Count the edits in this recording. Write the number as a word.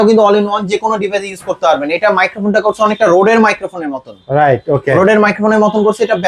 zero